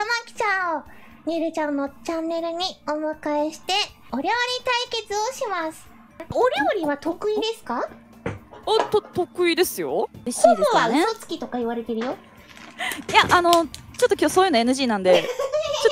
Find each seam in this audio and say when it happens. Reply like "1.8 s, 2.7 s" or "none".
4.1 s, 6.3 s, 10.2 s